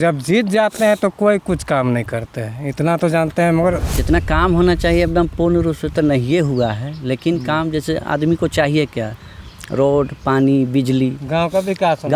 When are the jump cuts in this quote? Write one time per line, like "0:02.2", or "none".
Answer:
0:03.9